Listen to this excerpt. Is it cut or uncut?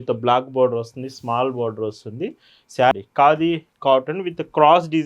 cut